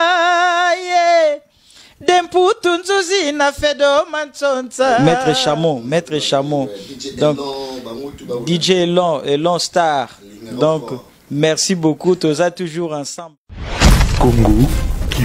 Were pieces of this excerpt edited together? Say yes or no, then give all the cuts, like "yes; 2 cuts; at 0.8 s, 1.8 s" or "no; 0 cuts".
yes; 2 cuts; at 5.0 s, 13.5 s